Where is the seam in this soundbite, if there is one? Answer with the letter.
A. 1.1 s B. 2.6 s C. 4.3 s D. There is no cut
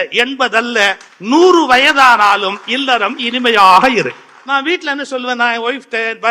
C